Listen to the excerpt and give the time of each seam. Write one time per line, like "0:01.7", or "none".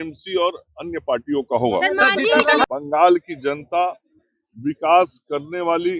0:02.6